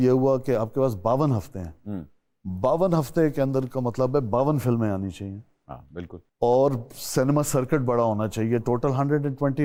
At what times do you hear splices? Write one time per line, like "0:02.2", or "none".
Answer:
none